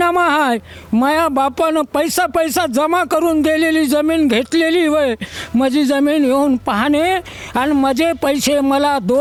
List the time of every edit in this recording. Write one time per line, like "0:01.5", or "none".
none

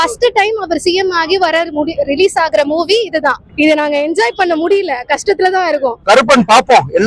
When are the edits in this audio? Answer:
0:03.4
0:05.9

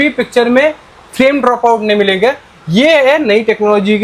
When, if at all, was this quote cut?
none

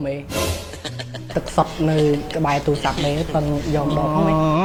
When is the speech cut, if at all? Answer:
none

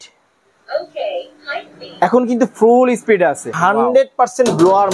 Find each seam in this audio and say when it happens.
0:03.6

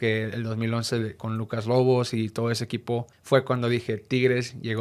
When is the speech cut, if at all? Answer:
0:03.1

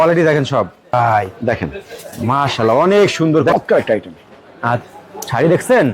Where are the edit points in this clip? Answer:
0:00.9
0:03.5

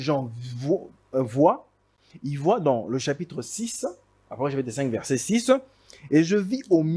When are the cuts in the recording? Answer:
none

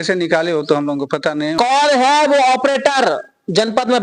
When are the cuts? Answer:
0:01.6

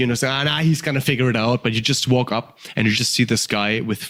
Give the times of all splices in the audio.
none

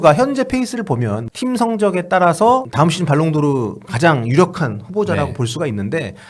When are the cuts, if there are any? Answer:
0:01.2
0:02.7

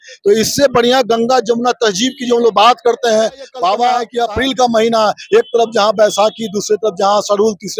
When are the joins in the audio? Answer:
0:04.1

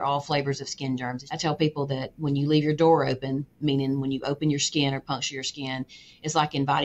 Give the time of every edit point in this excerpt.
0:01.2

